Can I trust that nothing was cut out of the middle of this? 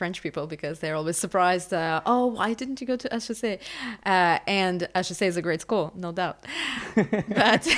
yes; 0 cuts

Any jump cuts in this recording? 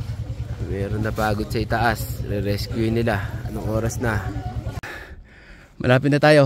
yes; 1 cut; at 4.9 s

